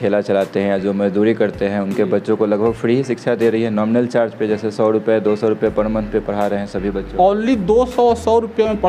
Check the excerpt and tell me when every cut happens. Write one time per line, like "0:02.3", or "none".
none

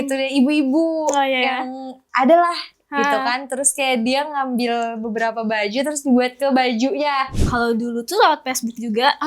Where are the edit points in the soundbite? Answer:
0:07.3

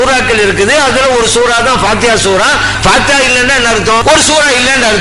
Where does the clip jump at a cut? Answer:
0:02.7
0:04.0

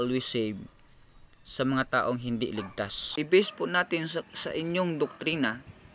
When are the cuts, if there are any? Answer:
0:03.0

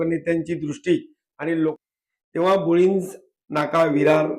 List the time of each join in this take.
0:01.8

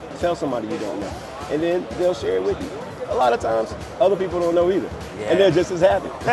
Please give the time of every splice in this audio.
none

